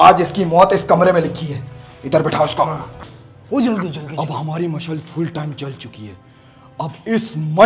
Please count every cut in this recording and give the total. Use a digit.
1